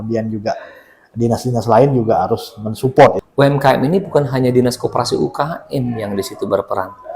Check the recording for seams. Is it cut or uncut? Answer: cut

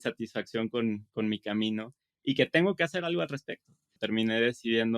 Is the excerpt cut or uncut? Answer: cut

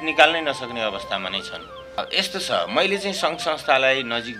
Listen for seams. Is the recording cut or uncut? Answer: cut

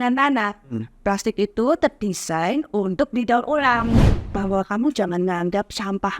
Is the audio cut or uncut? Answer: cut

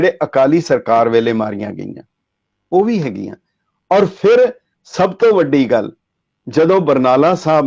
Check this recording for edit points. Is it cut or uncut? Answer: uncut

